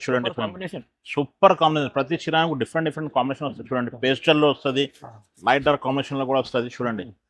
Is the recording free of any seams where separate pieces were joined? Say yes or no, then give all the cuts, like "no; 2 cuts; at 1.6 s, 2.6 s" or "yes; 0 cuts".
yes; 0 cuts